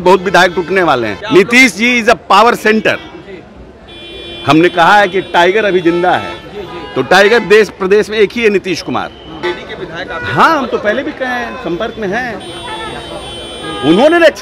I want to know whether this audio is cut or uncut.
cut